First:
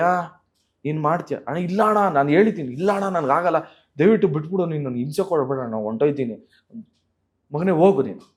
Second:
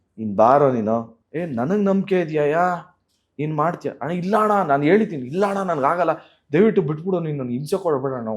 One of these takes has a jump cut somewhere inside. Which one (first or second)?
second